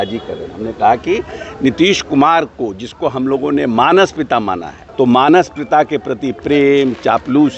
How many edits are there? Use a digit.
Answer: 1